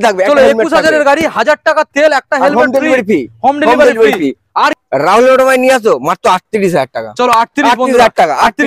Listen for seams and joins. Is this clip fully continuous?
no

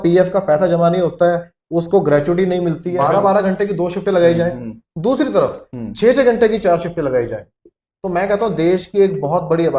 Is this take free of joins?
no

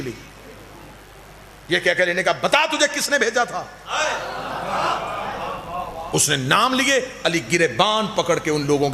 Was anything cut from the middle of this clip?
no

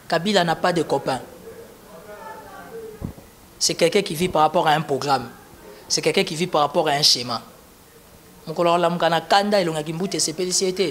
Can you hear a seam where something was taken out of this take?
no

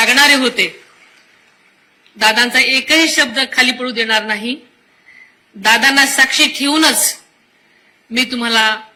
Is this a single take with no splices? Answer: yes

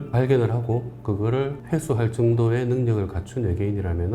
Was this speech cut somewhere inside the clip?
no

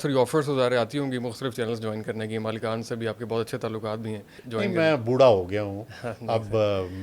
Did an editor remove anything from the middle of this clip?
yes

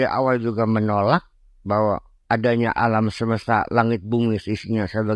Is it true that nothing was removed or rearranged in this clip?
yes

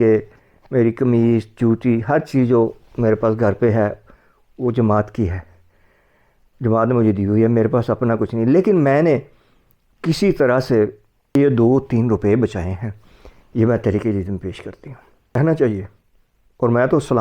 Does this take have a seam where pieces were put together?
yes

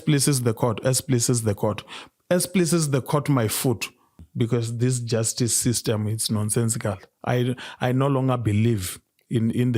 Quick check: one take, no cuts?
no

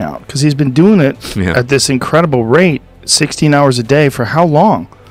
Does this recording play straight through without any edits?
yes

